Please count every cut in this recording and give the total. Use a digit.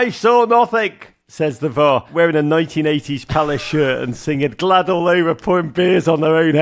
1